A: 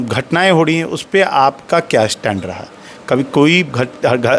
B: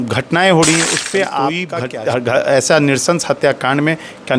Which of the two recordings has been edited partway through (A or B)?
B